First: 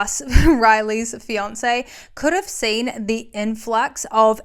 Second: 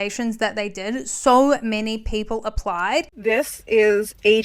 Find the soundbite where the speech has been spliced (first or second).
second